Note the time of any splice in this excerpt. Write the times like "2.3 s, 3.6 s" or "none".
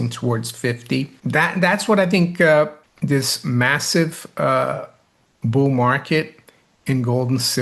1.2 s, 2.8 s